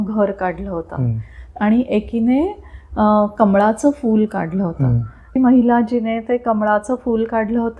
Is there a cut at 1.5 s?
yes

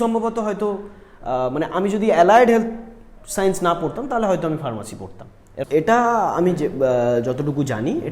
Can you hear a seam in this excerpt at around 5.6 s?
yes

